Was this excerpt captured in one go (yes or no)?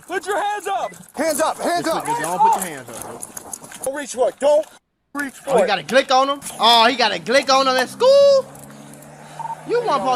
no